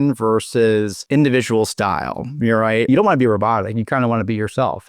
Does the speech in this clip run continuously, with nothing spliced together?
no; 2 cuts; at 1.0 s, 2.9 s

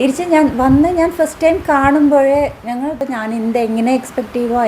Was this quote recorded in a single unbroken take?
no; 1 cut; at 3.1 s

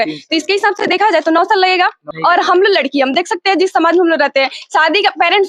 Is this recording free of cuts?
no; 1 cut; at 2.1 s

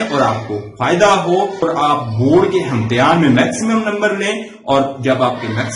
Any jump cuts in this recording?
yes; 1 cut; at 1.6 s

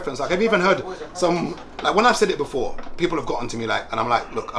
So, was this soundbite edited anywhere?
no; 0 cuts

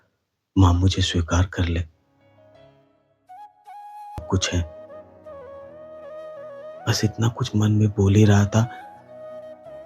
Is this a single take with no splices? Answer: no; 1 cut; at 4.2 s

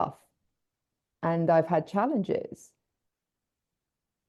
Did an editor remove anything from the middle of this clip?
no; 0 cuts

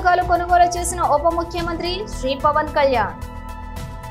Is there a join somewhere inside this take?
no; 0 cuts

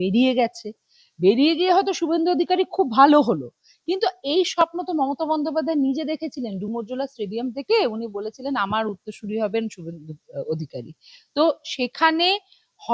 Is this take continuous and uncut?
yes; 0 cuts

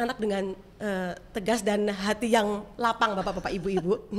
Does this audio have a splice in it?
no; 0 cuts

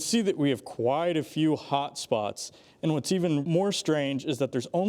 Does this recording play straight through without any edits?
no; 1 cut; at 3.5 s

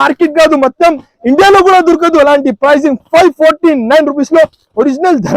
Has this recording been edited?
no; 0 cuts

